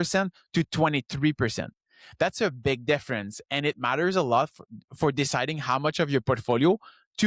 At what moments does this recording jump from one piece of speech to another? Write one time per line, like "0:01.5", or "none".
none